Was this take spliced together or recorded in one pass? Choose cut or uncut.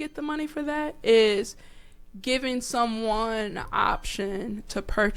uncut